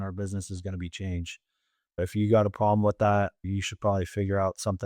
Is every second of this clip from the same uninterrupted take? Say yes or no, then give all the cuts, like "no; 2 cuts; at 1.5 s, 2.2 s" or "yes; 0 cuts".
yes; 0 cuts